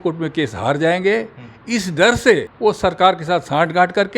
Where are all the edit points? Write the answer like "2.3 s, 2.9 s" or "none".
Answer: 2.5 s